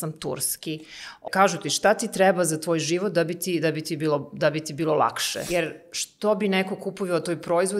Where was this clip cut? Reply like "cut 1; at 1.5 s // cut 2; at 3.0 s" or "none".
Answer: cut 1; at 1.2 s // cut 2; at 5.3 s